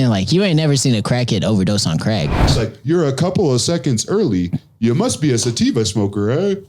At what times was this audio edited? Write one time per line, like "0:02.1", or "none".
0:02.4